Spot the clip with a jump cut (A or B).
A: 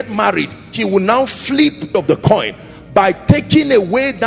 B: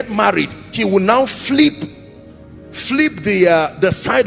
A